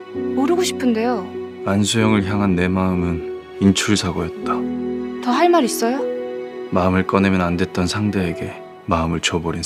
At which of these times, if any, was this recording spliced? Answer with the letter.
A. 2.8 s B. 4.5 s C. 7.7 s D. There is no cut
D